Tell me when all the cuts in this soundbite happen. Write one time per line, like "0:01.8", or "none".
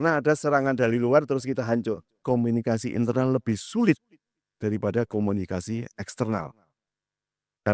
0:02.2